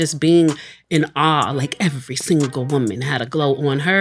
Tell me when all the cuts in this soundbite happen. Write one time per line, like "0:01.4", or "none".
none

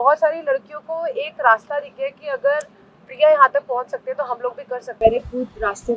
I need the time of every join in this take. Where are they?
0:05.0

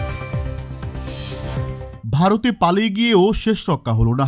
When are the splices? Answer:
0:02.0

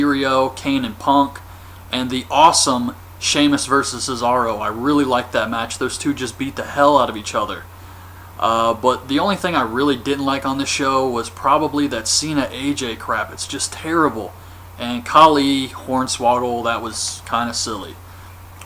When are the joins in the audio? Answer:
0:07.7

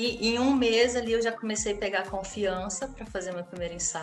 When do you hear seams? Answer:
none

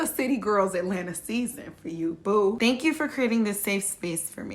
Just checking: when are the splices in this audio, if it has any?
0:02.6

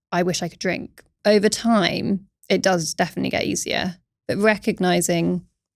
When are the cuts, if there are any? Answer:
0:01.1
0:02.3

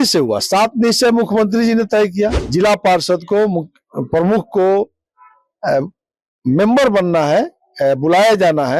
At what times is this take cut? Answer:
0:02.4

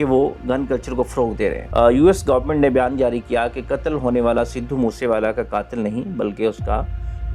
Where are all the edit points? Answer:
0:01.6

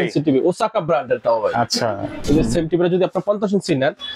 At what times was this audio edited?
0:02.2

